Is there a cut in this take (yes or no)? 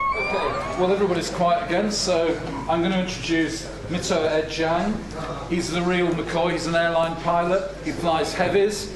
yes